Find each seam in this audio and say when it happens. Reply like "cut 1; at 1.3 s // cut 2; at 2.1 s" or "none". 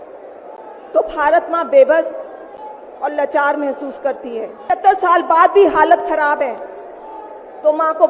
cut 1; at 4.6 s